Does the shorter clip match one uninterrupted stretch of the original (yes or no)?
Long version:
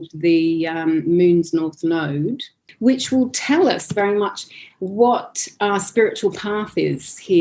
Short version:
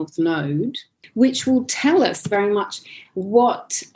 yes